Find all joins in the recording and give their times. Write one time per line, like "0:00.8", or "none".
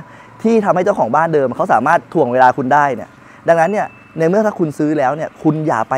none